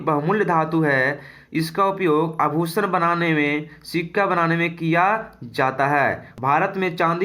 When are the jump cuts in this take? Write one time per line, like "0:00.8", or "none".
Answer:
0:06.3